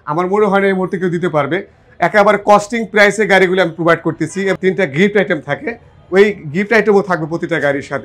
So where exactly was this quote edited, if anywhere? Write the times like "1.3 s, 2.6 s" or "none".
4.6 s